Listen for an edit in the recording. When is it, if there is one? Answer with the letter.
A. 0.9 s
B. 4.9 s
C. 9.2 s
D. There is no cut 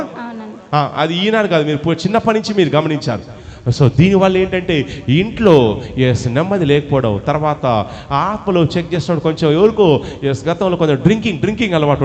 D